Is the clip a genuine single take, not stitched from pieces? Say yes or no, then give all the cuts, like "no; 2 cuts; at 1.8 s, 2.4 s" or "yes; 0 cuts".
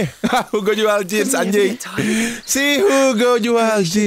yes; 0 cuts